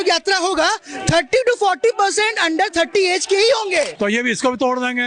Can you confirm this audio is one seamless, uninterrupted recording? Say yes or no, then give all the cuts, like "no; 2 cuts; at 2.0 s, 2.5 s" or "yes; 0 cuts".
no; 1 cut; at 3.9 s